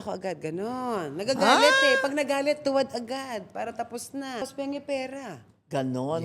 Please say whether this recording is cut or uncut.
cut